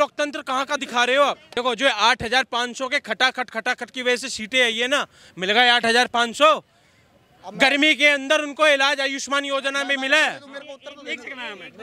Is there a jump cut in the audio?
yes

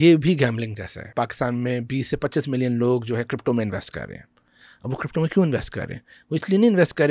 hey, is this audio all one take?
no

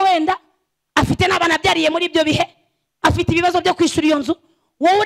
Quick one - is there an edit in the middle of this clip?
no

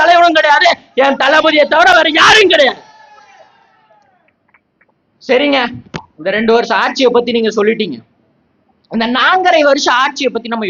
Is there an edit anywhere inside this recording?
no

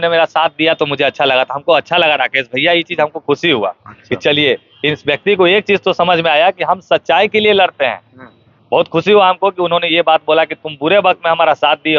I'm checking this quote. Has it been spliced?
no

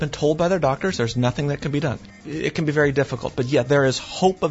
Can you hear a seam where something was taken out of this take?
yes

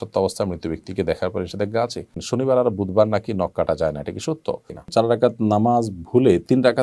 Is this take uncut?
no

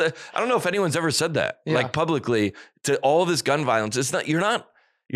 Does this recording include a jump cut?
no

